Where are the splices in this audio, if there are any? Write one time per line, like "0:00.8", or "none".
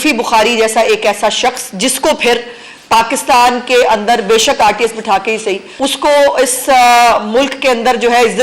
0:05.7